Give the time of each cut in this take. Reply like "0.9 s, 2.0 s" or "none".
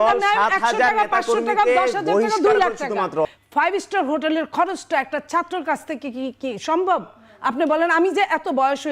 3.2 s